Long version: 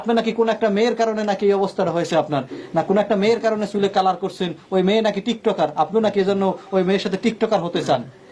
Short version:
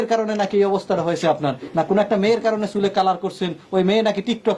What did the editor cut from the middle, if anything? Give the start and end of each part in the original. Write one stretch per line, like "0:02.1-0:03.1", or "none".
0:02.5-0:02.6